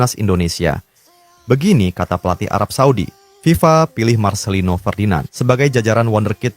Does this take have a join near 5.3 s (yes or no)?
yes